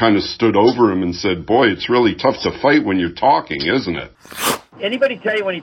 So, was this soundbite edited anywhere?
yes; 1 cut; at 4.4 s

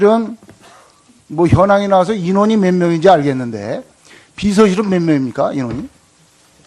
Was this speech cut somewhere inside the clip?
yes; 1 cut; at 2.2 s

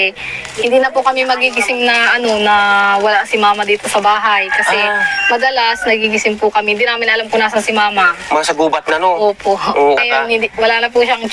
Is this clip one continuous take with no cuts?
no; 2 cuts; at 8.7 s, 10.0 s

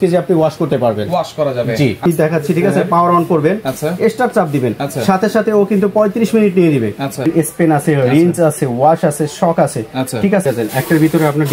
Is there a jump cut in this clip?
yes; 3 cuts; at 2.1 s, 7.2 s, 10.4 s

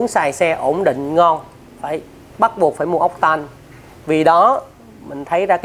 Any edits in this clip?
no; 0 cuts

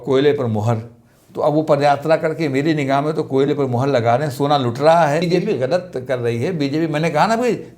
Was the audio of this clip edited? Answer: yes; 1 cut; at 5.2 s

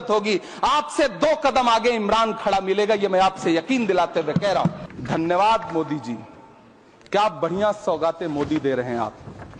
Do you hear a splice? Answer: yes; 1 cut; at 4.8 s

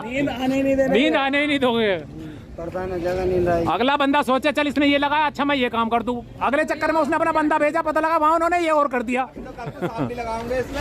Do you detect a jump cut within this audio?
no; 0 cuts

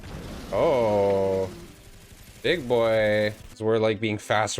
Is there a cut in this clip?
yes; 1 cut; at 3.5 s

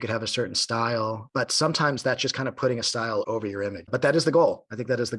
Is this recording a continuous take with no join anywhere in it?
no; 2 cuts; at 1.2 s, 3.3 s

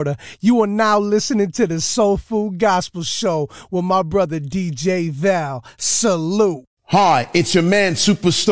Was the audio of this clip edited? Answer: yes; 1 cut; at 6.8 s

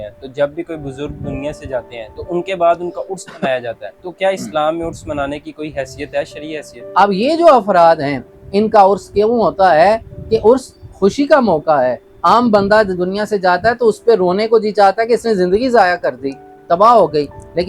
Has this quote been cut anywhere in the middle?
yes; 1 cut; at 6.8 s

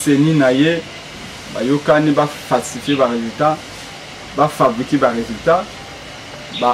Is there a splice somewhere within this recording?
no; 0 cuts

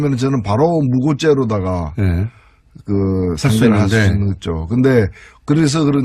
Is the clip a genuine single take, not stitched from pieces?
yes; 0 cuts

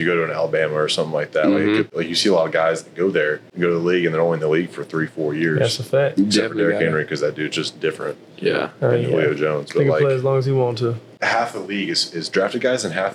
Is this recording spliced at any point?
yes; 3 cuts; at 1.9 s, 3.4 s, 11.1 s

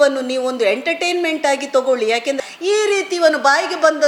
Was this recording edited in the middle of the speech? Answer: yes; 1 cut; at 2.4 s

